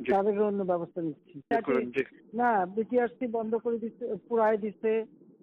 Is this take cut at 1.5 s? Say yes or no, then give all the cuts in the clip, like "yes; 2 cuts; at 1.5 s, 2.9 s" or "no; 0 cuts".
yes; 1 cut; at 1.5 s